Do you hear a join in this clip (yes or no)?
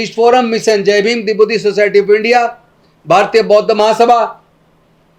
no